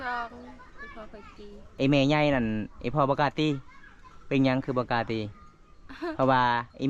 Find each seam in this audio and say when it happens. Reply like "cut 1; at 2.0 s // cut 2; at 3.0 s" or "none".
cut 1; at 1.6 s